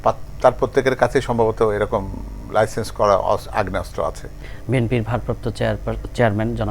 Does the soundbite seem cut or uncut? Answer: cut